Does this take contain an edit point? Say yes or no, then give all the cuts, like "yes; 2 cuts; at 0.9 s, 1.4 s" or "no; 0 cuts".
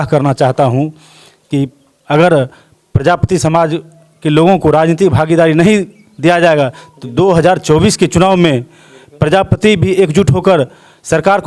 no; 0 cuts